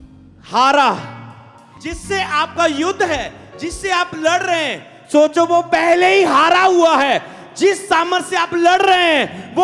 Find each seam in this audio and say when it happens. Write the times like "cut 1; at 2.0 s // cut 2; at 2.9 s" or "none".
cut 1; at 1.7 s